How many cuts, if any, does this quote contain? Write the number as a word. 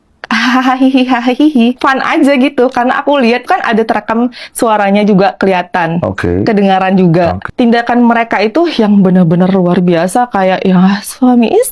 three